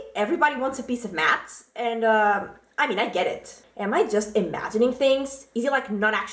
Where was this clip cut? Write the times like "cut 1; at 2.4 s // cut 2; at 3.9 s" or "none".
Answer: cut 1; at 3.6 s

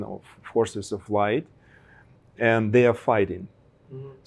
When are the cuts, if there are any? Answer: none

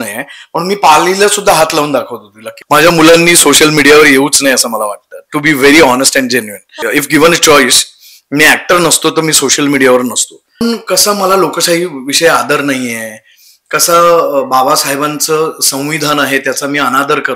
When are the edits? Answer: cut 1; at 2.5 s // cut 2; at 6.8 s // cut 3; at 10.6 s

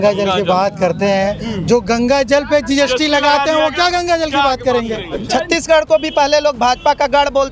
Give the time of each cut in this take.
cut 1; at 5.1 s

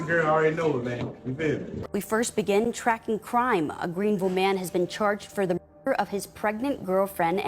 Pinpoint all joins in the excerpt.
cut 1; at 1.7 s

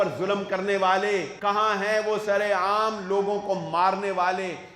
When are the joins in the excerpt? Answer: cut 1; at 1.3 s

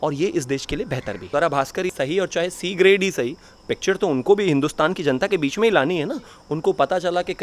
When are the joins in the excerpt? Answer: cut 1; at 1.2 s // cut 2; at 1.9 s

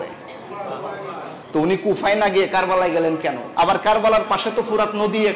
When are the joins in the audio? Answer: cut 1; at 3.4 s

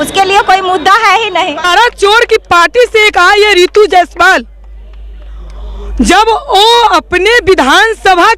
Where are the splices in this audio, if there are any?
cut 1; at 1.7 s

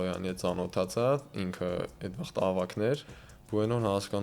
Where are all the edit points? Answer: cut 1; at 3.1 s

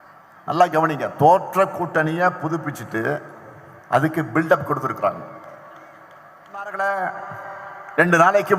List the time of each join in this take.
cut 1; at 6.7 s

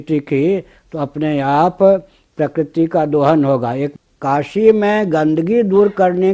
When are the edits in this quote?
cut 1; at 3.9 s

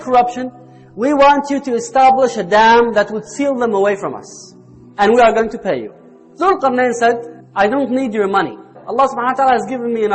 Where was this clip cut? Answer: none

